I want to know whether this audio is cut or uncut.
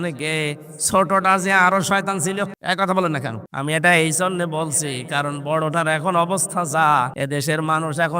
cut